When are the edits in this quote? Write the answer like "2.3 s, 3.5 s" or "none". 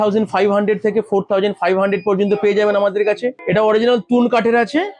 3.4 s